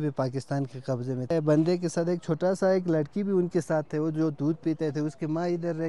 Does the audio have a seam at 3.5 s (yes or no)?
no